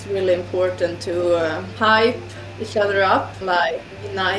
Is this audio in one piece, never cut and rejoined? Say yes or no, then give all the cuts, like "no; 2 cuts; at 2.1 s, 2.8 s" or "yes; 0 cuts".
no; 2 cuts; at 1.7 s, 3.4 s